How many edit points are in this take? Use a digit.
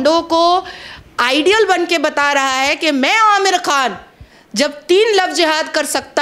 0